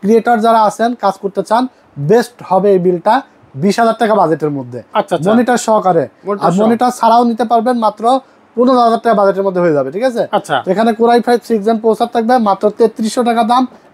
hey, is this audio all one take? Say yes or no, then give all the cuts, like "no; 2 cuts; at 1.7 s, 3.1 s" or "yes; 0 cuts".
yes; 0 cuts